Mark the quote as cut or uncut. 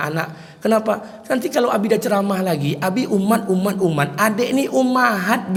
uncut